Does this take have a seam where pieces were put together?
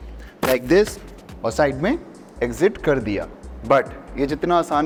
no; 0 cuts

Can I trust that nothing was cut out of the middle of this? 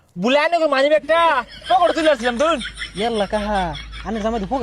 no; 1 cut; at 2.8 s

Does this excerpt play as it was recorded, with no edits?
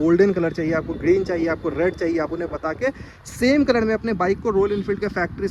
yes; 0 cuts

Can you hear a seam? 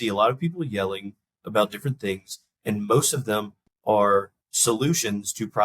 yes; 1 cut; at 4.4 s

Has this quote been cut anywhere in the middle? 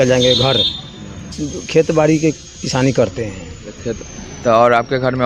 yes; 1 cut; at 1.5 s

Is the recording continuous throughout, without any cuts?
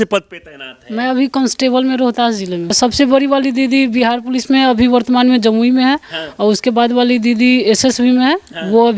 no; 1 cut; at 2.8 s

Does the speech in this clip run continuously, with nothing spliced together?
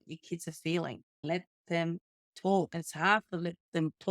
no; 2 cuts; at 1.2 s, 2.7 s

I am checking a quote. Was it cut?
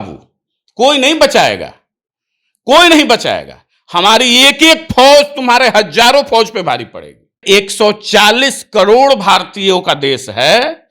yes; 1 cut; at 7.4 s

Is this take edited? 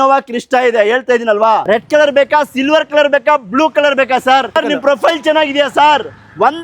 yes; 2 cuts; at 1.6 s, 4.5 s

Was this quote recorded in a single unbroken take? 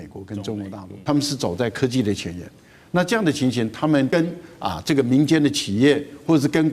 no; 2 cuts; at 0.9 s, 4.1 s

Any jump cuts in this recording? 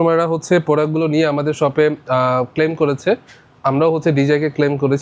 no; 0 cuts

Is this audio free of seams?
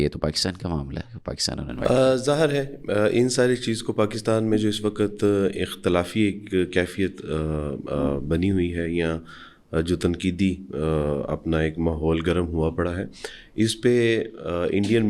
yes; 0 cuts

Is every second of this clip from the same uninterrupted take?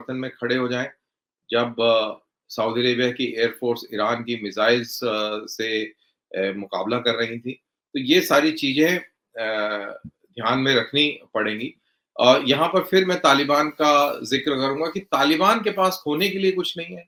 yes; 0 cuts

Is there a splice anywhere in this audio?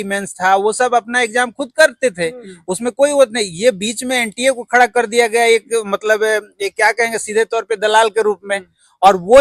no; 0 cuts

